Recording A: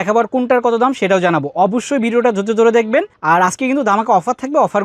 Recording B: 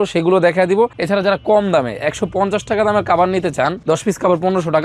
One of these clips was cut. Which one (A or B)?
B